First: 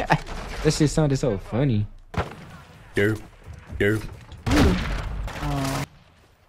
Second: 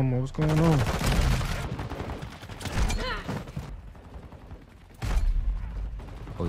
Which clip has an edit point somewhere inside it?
second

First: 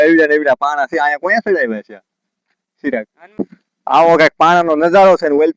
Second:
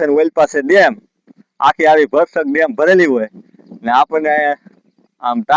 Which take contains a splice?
first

